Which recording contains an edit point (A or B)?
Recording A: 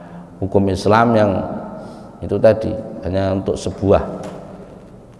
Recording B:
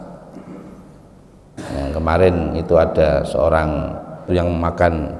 B